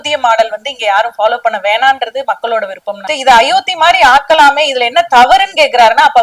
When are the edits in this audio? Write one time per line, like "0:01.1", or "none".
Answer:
0:03.1